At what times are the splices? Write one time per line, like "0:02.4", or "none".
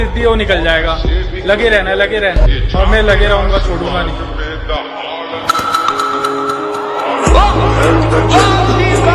none